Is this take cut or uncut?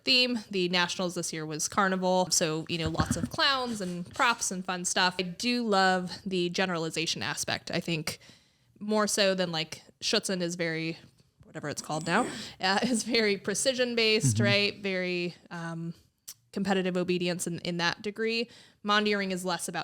cut